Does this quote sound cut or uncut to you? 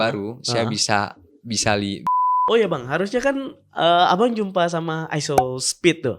cut